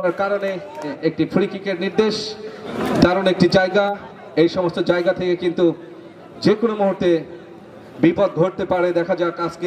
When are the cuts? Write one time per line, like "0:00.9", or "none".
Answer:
0:00.9
0:02.8